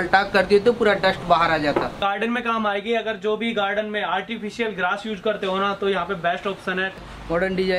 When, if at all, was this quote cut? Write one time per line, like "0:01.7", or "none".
0:02.0
0:06.9